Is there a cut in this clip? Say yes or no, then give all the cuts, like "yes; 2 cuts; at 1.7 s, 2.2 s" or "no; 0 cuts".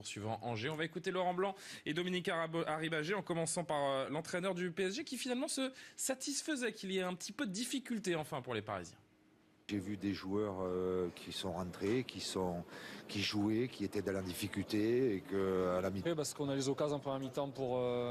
no; 0 cuts